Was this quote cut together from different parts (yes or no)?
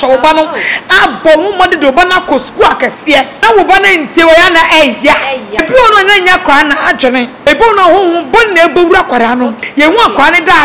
yes